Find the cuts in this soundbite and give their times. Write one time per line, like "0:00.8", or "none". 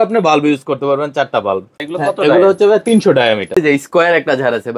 0:01.8
0:03.6